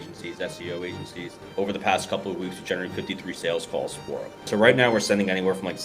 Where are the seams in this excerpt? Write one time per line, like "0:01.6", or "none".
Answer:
0:01.4
0:04.4